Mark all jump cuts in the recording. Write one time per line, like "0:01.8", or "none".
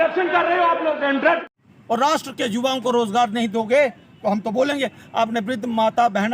0:01.5